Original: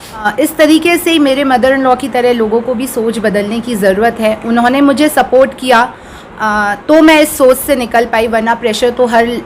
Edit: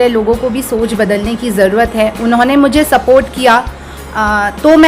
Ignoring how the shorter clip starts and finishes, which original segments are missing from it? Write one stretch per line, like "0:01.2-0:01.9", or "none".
none